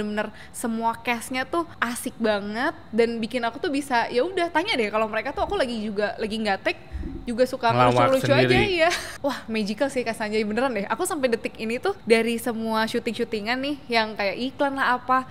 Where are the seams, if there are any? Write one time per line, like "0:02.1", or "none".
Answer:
0:01.7
0:09.0
0:12.0